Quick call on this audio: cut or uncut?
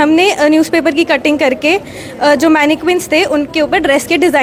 uncut